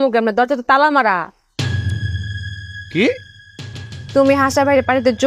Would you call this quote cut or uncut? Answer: uncut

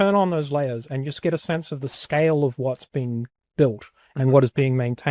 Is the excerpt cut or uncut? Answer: uncut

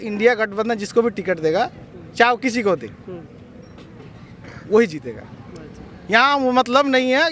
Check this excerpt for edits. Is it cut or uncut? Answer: uncut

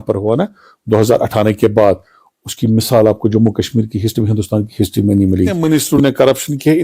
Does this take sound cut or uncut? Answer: cut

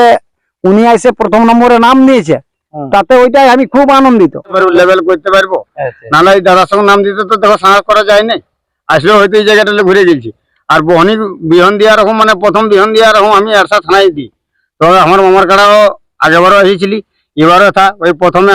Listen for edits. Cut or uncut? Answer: cut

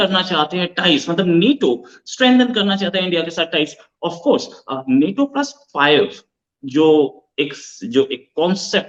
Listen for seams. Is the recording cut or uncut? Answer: uncut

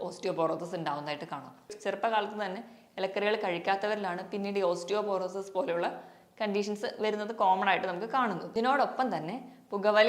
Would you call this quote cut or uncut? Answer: cut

